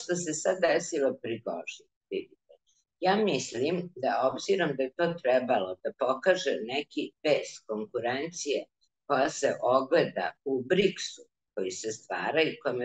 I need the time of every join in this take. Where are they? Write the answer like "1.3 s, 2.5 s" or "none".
none